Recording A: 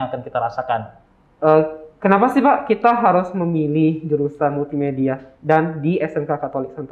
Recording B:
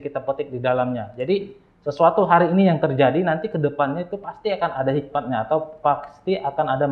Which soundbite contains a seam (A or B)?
A